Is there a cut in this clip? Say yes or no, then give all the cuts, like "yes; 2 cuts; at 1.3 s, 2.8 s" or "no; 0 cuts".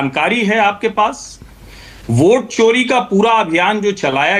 no; 0 cuts